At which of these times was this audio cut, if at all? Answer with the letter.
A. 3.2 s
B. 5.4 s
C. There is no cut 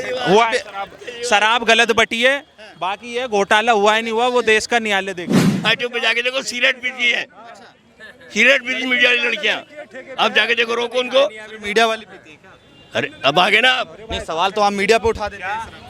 B